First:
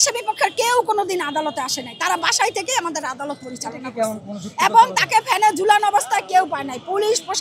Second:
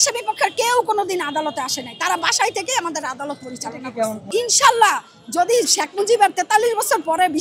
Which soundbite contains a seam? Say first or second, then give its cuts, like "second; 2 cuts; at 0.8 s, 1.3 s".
second; 1 cut; at 4.2 s